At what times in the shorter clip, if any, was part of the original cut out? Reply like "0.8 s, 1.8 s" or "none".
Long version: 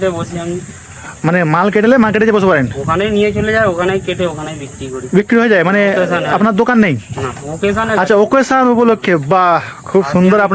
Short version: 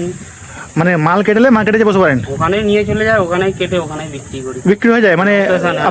none